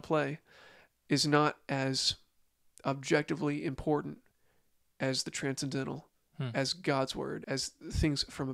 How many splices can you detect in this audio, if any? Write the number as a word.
one